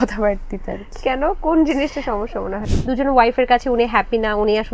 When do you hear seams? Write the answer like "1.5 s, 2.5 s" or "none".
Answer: 2.6 s